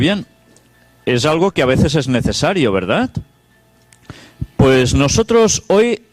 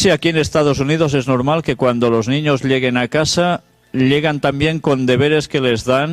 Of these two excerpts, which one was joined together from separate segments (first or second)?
first